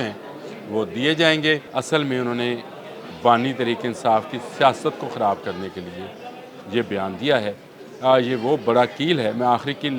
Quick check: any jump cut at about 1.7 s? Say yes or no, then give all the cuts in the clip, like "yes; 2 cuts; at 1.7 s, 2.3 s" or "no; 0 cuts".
yes; 1 cut; at 1.7 s